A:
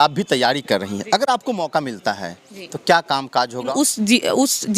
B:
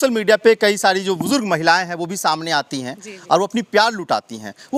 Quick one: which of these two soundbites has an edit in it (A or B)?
A